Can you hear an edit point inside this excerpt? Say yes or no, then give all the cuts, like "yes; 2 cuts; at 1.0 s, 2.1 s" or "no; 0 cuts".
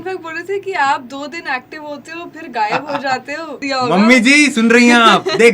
yes; 1 cut; at 3.6 s